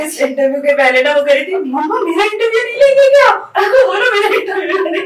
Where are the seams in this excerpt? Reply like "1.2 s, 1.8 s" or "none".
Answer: none